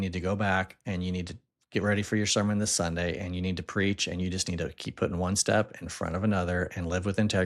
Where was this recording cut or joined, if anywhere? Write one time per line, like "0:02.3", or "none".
none